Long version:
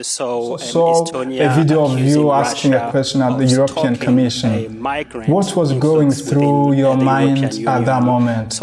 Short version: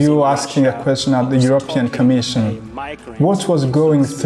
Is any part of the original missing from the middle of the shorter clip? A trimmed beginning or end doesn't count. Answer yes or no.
no